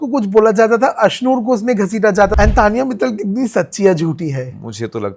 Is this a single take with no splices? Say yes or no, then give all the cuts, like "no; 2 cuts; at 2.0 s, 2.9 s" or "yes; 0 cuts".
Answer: no; 1 cut; at 2.3 s